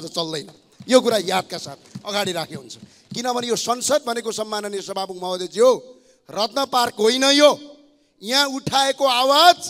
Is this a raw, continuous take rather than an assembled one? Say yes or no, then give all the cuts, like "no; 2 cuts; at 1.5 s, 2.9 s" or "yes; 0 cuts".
yes; 0 cuts